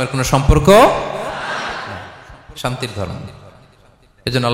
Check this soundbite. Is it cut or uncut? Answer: uncut